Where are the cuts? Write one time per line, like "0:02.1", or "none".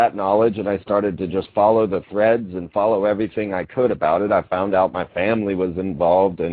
0:02.8